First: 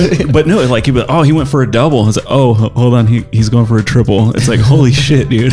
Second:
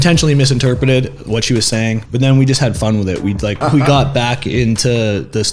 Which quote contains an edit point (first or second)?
second